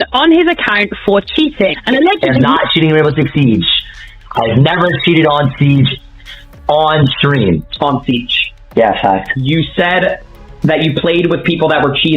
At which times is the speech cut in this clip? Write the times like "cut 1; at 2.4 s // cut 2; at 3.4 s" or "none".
cut 1; at 2.2 s // cut 2; at 7.7 s